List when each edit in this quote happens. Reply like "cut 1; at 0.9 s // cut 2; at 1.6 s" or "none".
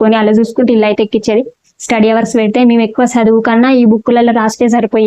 none